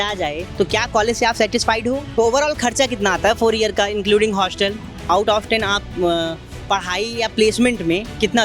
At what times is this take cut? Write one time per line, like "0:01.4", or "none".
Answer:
0:02.1
0:05.1